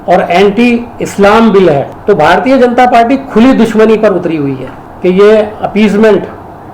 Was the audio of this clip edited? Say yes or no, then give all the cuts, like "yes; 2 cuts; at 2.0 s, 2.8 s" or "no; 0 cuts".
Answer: yes; 2 cuts; at 1.9 s, 4.9 s